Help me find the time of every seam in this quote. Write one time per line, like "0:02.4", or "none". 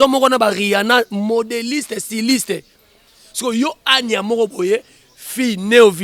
none